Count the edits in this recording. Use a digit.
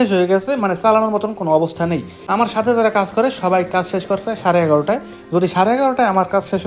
1